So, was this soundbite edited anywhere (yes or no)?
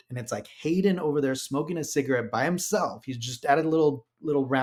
no